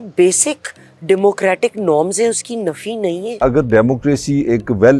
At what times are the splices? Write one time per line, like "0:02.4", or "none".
0:03.4